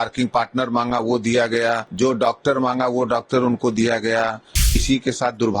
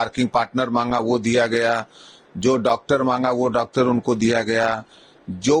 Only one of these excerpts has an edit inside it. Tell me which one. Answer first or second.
first